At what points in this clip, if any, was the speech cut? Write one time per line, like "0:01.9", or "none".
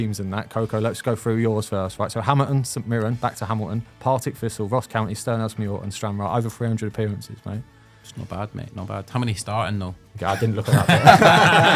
none